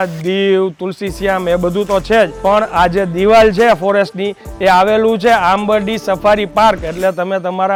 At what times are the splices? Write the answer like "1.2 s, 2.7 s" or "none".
none